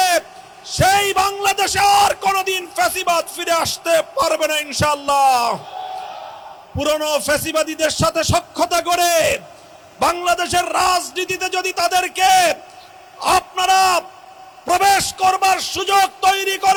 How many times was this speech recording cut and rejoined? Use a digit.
0